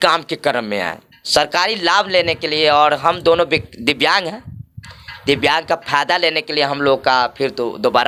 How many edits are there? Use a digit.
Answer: 1